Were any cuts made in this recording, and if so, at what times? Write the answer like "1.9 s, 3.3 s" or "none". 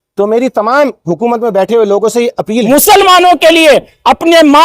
2.6 s